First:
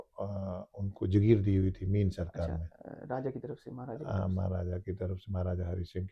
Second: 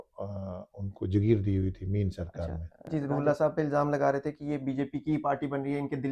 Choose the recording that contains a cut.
second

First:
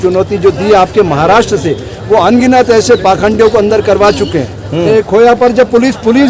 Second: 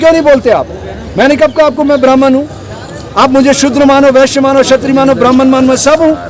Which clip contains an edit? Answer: first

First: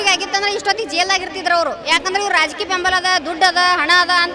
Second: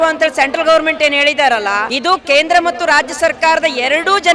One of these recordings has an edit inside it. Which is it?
second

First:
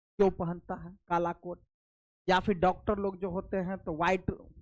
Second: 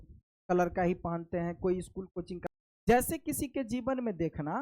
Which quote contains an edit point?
second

